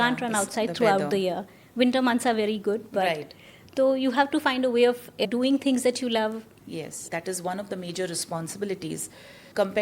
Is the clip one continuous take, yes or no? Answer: no